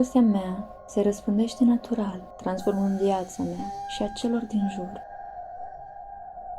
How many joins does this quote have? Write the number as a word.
one